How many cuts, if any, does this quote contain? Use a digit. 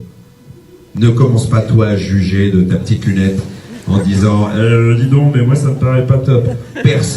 1